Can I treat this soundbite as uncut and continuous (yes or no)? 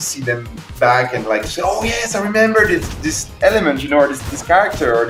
yes